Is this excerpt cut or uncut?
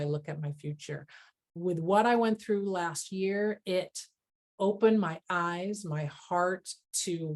cut